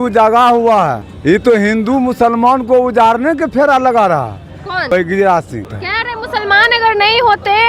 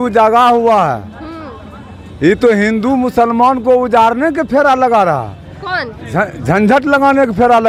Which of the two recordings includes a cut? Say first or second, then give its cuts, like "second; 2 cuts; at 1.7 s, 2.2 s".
first; 3 cuts; at 1.1 s, 4.9 s, 5.8 s